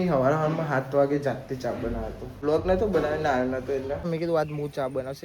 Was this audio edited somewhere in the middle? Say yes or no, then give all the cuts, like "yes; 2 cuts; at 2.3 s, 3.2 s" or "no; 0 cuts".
yes; 1 cut; at 4.0 s